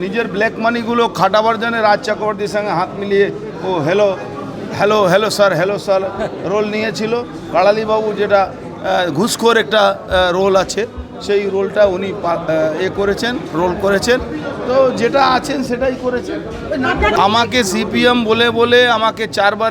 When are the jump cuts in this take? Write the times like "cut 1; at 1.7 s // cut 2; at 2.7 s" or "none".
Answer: cut 1; at 17.2 s

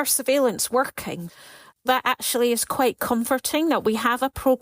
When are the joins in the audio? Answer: cut 1; at 1.2 s

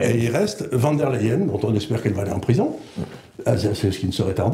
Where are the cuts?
none

